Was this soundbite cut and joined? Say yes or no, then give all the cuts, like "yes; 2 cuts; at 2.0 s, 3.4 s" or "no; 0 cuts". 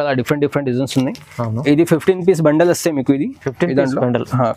no; 0 cuts